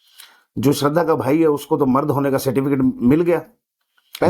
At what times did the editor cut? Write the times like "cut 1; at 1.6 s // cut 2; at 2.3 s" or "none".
none